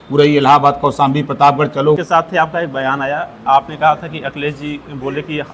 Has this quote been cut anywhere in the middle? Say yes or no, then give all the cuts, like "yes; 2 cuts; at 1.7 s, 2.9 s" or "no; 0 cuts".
yes; 1 cut; at 2.0 s